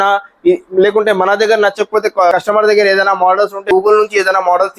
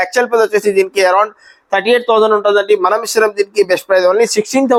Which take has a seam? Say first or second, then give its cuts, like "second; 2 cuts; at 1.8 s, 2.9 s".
first; 2 cuts; at 2.3 s, 3.6 s